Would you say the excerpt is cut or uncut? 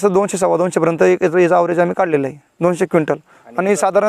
cut